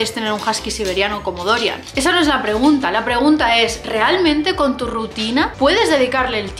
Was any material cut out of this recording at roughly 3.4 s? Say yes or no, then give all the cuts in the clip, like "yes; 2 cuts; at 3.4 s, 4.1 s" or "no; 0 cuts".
no; 2 cuts; at 1.8 s, 5.5 s